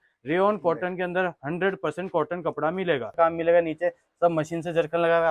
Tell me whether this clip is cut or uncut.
cut